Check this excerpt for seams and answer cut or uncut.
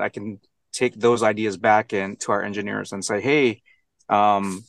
uncut